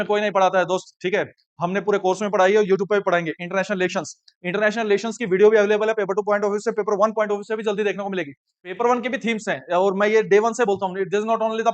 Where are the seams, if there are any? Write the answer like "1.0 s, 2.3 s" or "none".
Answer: 8.7 s